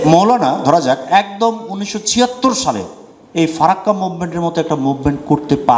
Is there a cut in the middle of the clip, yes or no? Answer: no